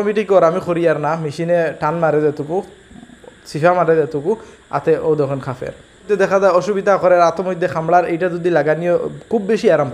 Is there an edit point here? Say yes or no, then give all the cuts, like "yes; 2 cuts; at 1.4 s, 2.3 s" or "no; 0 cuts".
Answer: yes; 1 cut; at 6.1 s